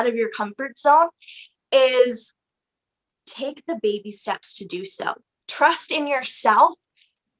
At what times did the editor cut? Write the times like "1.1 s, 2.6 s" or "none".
5.4 s